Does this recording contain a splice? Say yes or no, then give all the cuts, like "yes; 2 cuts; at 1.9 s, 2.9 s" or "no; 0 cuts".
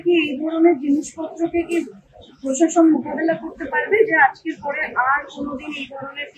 no; 0 cuts